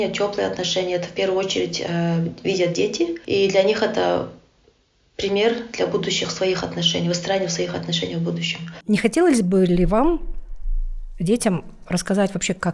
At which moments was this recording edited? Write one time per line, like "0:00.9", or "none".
0:03.2
0:08.8